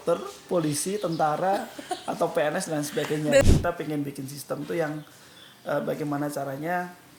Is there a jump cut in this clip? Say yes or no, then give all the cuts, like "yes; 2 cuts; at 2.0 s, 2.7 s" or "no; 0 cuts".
yes; 1 cut; at 3.4 s